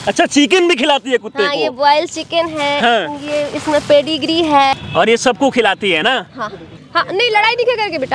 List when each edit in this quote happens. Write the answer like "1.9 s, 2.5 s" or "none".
4.7 s, 6.7 s